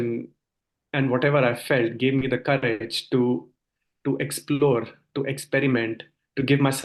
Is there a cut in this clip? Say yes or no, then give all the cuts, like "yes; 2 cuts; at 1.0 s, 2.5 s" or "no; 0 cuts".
no; 0 cuts